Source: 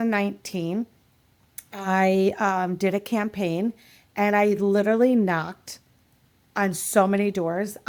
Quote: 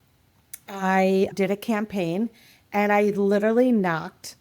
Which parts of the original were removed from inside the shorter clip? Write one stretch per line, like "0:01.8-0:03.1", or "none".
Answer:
0:02.4-0:02.8